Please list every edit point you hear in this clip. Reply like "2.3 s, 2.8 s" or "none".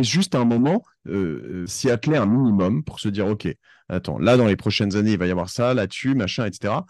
1.7 s